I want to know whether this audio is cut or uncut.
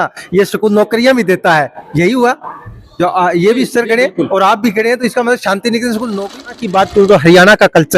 cut